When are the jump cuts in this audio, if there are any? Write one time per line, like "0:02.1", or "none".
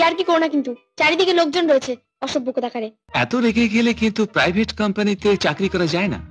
0:03.0